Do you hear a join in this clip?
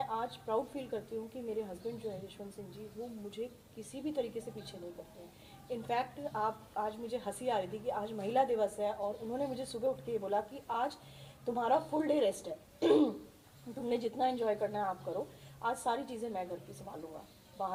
no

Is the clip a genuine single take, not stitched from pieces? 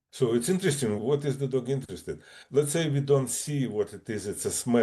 no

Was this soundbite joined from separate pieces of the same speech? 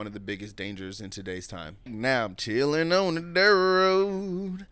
yes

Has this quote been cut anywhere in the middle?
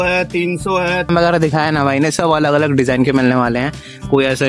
yes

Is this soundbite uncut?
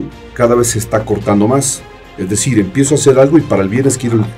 yes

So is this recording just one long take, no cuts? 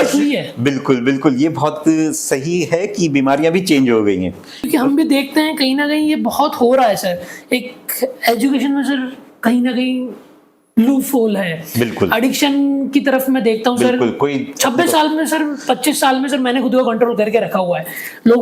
no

